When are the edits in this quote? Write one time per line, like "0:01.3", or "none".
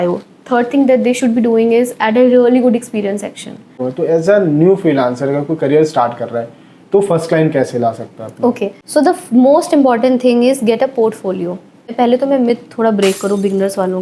0:03.8
0:08.8
0:11.9